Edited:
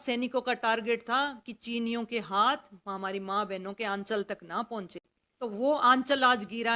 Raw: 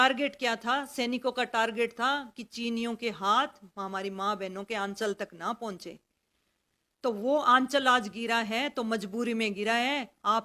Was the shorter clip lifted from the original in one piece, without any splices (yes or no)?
no